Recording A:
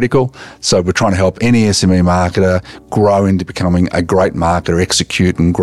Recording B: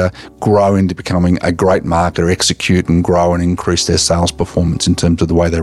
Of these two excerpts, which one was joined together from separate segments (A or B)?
A